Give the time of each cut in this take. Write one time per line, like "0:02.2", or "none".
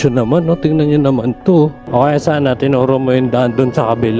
0:01.8